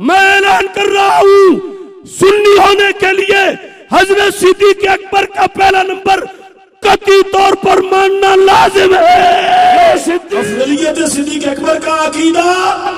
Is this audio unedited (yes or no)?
no